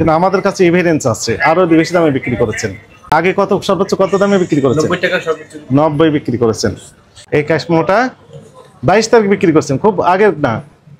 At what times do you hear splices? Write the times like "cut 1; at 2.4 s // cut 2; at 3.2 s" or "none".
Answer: cut 1; at 3.1 s // cut 2; at 7.1 s